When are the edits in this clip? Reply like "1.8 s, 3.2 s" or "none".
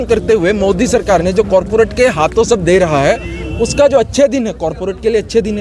none